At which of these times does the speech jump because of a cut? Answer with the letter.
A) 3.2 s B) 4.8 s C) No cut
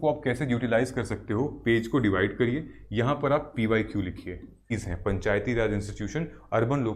B